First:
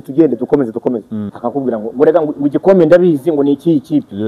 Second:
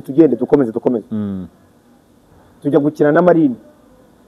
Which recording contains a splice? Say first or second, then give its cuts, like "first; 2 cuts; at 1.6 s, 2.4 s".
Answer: first; 1 cut; at 1.2 s